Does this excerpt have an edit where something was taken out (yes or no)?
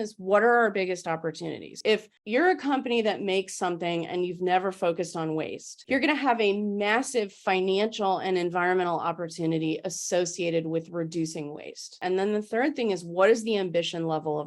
no